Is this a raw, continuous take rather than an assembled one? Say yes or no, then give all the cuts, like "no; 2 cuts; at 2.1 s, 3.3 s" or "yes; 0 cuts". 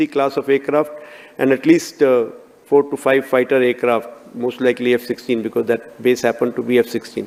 yes; 0 cuts